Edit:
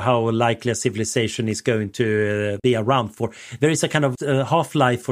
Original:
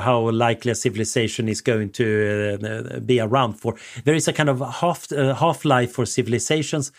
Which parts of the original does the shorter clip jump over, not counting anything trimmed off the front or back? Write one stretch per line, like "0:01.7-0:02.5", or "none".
0:02.6-0:03.0
0:04.6-0:05.1